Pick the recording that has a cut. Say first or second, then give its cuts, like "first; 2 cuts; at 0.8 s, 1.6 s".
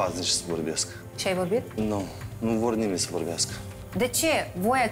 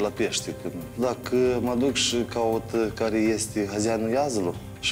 second; 1 cut; at 1.0 s